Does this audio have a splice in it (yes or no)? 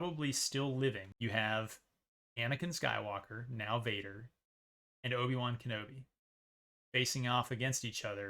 yes